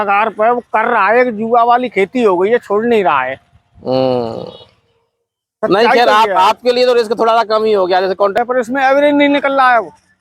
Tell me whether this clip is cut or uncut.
cut